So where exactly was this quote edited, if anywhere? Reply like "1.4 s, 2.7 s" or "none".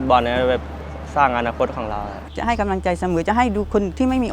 2.2 s